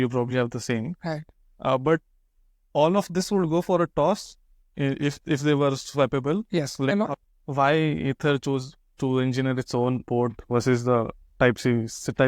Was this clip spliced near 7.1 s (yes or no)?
yes